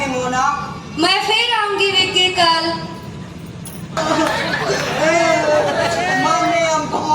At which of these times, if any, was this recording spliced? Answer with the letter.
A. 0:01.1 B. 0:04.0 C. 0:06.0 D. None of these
B